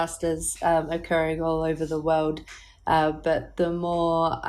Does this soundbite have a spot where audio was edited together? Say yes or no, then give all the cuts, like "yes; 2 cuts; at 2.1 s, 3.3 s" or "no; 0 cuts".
no; 0 cuts